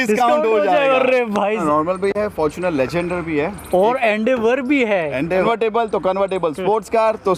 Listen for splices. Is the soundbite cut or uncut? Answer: cut